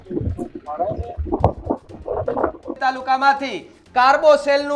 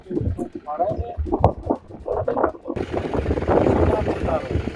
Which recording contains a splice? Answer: first; 1 cut; at 2.7 s

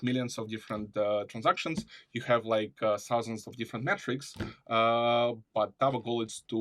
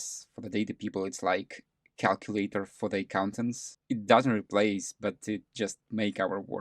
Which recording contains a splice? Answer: second; 1 cut; at 3.6 s

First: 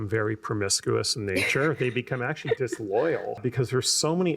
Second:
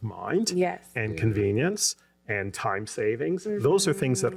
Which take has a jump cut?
first; 1 cut; at 3.4 s

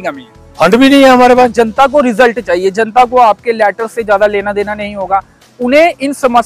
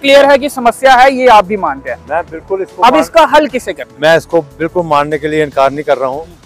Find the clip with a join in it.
first; 1 cut; at 1.5 s

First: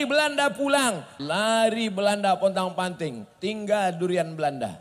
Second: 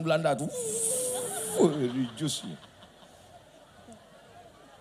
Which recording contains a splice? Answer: first; 1 cut; at 1.1 s

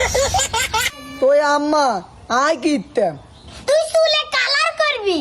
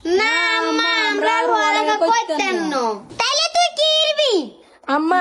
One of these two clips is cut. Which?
first; 1 cut; at 1.0 s

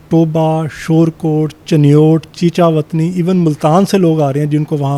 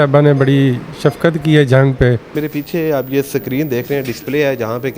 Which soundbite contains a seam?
second; 1 cut; at 2.3 s

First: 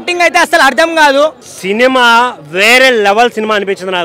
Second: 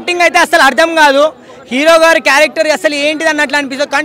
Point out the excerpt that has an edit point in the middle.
first; 1 cut; at 1.5 s

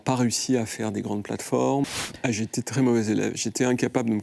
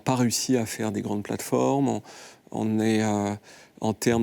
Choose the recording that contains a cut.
first; 1 cut; at 1.9 s

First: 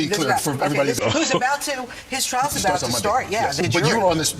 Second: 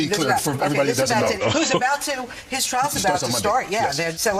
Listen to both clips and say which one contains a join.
first; 2 cuts; at 1.0 s, 3.6 s

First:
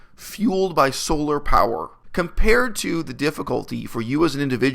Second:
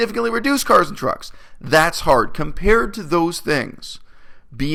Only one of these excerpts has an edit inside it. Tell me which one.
first; 1 cut; at 2.0 s

